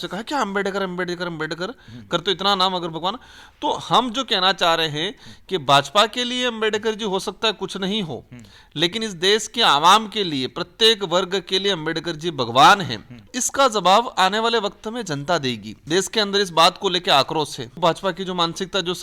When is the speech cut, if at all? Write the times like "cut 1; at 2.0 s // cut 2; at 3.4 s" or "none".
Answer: cut 1; at 13.3 s // cut 2; at 15.7 s // cut 3; at 17.8 s